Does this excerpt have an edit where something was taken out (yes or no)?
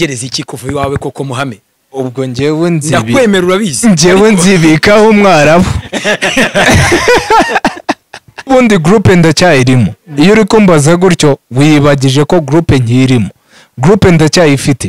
yes